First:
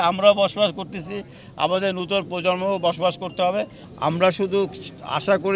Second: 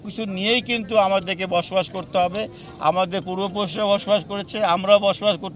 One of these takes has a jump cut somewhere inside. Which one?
first; 1 cut; at 3.8 s

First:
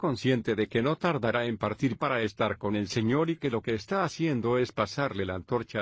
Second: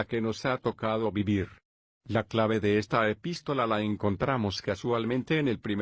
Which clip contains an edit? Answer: first; 1 cut; at 1.0 s

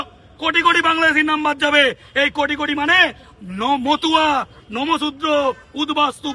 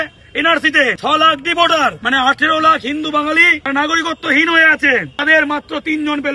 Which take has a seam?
second; 4 cuts; at 1.0 s, 2.0 s, 3.6 s, 5.2 s

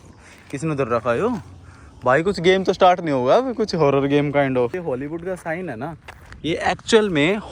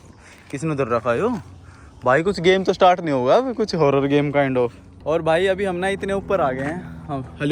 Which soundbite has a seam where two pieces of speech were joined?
first; 1 cut; at 4.8 s

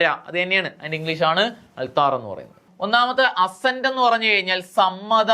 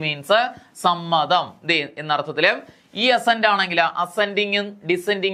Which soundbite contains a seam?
first; 1 cut; at 2.7 s

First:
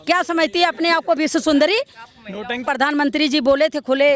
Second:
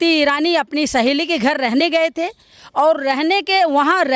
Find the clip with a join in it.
first; 1 cut; at 2.6 s

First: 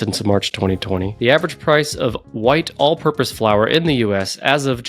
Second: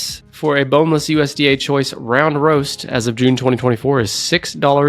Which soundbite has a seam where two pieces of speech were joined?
first; 1 cut; at 1.1 s

